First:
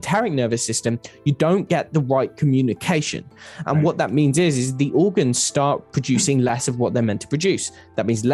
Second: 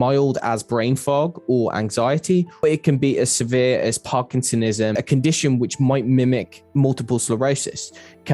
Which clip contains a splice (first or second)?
second